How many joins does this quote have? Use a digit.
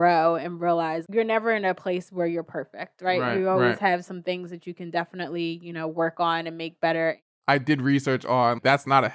1